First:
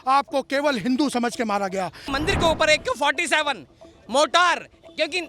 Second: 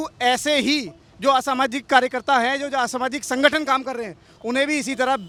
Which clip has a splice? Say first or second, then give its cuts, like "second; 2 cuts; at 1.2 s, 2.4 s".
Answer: first; 1 cut; at 2.0 s